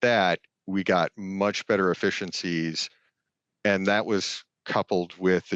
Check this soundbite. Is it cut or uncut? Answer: uncut